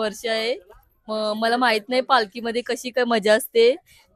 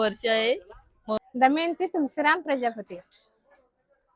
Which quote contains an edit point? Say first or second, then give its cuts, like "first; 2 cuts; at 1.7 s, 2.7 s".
second; 1 cut; at 1.2 s